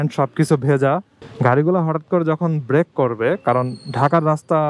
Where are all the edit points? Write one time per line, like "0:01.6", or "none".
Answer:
0:01.2